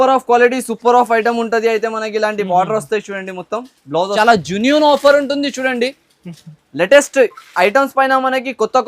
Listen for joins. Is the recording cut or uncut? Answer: cut